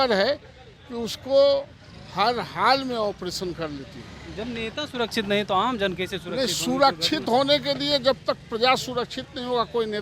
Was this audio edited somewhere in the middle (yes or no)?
no